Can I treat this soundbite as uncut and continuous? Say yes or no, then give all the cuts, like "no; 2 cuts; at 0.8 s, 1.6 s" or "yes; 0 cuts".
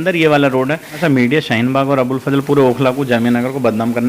no; 1 cut; at 1.0 s